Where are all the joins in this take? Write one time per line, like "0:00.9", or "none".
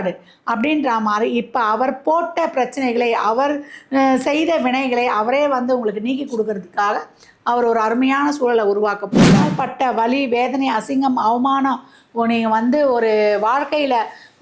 0:09.4